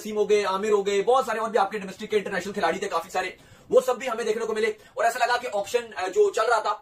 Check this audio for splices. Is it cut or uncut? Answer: uncut